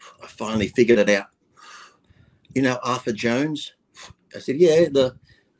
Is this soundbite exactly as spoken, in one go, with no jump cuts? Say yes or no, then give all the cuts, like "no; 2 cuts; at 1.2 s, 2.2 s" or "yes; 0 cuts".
yes; 0 cuts